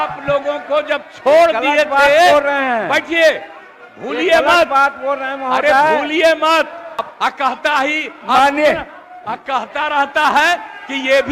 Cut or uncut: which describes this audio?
cut